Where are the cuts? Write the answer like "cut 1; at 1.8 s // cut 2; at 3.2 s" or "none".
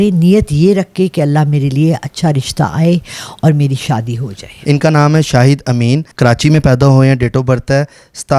cut 1; at 4.5 s // cut 2; at 6.1 s